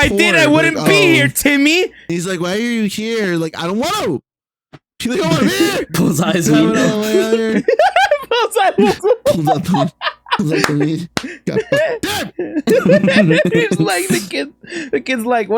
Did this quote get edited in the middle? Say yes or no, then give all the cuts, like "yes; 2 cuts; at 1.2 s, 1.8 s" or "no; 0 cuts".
yes; 2 cuts; at 2.2 s, 5.9 s